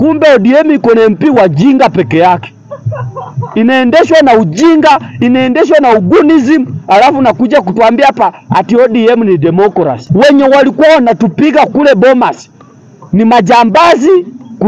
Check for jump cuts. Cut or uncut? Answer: cut